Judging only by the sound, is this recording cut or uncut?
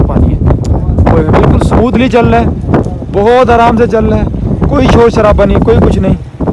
uncut